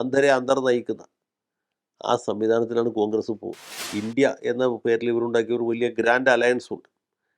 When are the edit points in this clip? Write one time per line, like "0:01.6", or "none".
0:03.8